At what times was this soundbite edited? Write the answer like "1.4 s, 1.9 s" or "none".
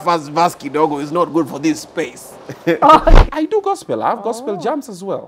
3.3 s